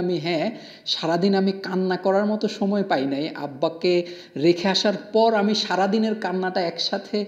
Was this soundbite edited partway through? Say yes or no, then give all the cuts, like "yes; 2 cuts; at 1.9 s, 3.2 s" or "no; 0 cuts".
no; 0 cuts